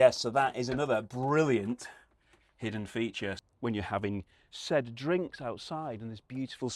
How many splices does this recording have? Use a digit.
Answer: 1